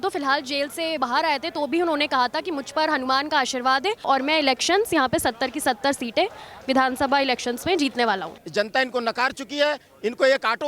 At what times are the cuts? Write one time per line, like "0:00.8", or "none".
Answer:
0:01.0
0:04.0
0:08.4